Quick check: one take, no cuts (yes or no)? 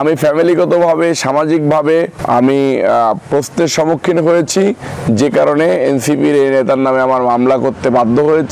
no